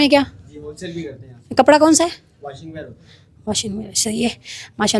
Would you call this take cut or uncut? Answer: uncut